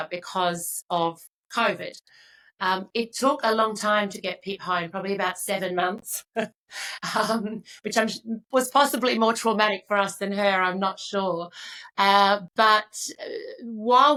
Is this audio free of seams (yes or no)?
yes